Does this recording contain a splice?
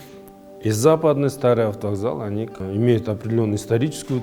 yes; 1 cut; at 2.6 s

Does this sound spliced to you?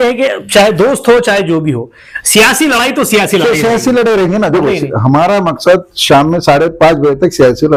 no; 0 cuts

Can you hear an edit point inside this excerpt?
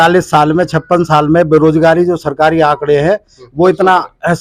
no; 0 cuts

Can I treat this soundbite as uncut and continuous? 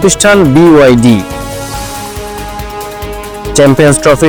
yes; 0 cuts

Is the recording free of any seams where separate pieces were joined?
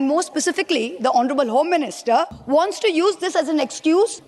yes; 0 cuts

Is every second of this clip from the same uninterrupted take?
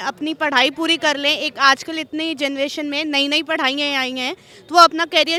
yes; 0 cuts

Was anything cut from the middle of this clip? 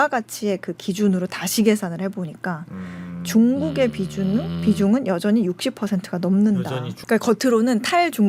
yes; 1 cut; at 6.9 s

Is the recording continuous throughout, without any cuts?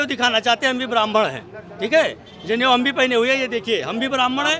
yes; 0 cuts

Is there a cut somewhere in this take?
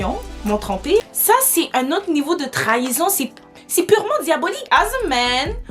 yes; 2 cuts; at 1.0 s, 4.7 s

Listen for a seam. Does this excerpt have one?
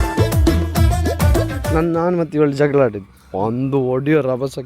yes; 1 cut; at 1.6 s

